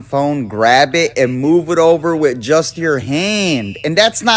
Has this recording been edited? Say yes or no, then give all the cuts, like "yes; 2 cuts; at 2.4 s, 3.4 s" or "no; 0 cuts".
no; 0 cuts